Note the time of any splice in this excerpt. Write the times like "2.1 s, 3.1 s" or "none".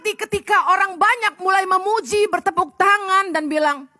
none